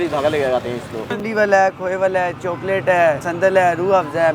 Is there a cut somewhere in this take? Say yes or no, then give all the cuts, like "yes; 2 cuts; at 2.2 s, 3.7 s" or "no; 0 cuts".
yes; 1 cut; at 1.1 s